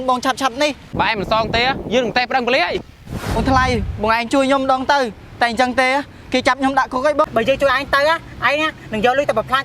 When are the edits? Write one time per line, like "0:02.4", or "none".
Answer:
0:00.8
0:03.4
0:07.3